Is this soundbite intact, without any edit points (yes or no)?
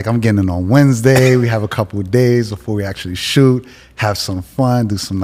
yes